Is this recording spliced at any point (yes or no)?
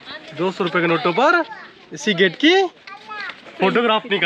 no